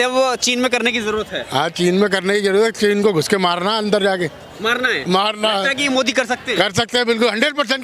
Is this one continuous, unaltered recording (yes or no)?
yes